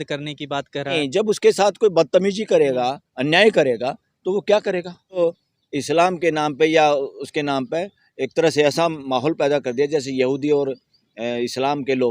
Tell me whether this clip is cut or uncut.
cut